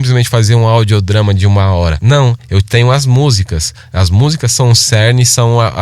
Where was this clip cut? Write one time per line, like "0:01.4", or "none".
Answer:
0:02.0